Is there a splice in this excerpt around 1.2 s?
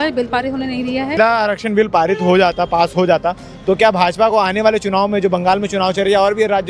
yes; 1 cut; at 1.2 s

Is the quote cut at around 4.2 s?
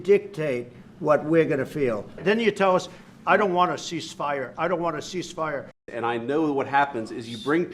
no; 2 cuts; at 2.2 s, 5.8 s

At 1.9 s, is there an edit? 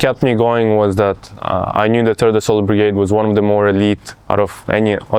no; 0 cuts

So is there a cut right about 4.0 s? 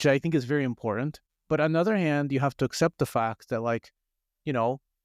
no; 1 cut; at 1.3 s

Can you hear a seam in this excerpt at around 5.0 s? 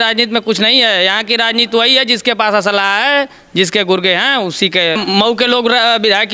yes; 1 cut; at 5.0 s

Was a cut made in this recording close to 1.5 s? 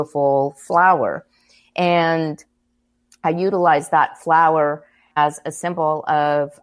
no; 1 cut; at 5.0 s

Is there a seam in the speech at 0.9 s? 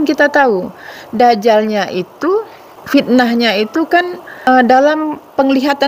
no; 2 cuts; at 2.7 s, 4.5 s

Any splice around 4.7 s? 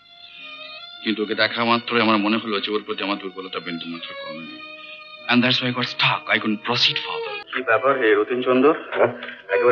no; 1 cut; at 7.4 s

